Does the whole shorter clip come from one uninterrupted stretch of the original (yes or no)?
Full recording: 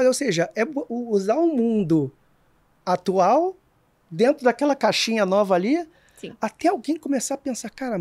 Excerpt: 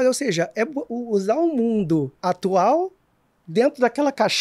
no